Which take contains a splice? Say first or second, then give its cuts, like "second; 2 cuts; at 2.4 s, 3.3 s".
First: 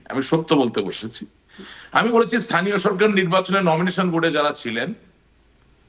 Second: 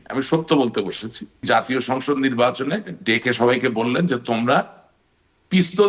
second; 1 cut; at 1.5 s